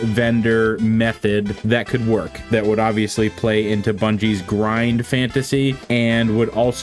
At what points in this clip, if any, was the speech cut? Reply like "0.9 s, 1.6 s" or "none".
1.6 s